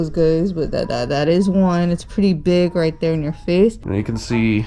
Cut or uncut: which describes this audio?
cut